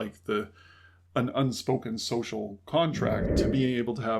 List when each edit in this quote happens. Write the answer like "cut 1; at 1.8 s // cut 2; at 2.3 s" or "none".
cut 1; at 3.3 s